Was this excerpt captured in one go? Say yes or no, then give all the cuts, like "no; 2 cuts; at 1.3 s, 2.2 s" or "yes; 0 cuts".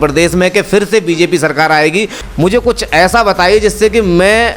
no; 1 cut; at 2.2 s